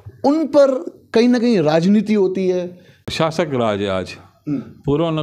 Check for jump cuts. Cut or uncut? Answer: cut